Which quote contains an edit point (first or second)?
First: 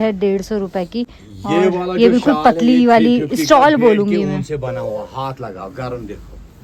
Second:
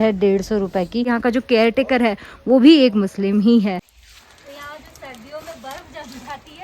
second